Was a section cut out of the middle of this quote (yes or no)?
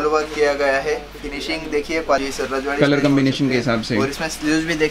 yes